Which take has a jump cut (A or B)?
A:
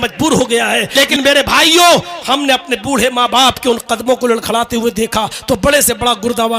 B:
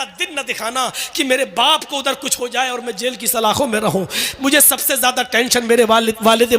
A